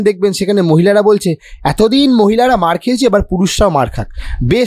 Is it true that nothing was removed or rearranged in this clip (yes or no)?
yes